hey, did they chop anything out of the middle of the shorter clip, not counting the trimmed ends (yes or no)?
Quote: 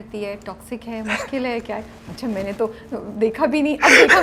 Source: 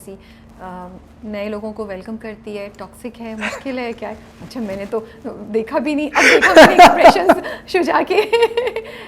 no